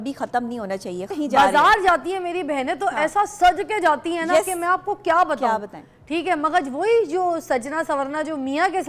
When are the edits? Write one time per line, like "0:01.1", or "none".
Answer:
0:01.1